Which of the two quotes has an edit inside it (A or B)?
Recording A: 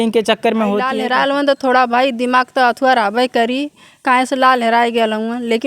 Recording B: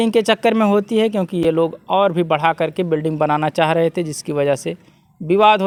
A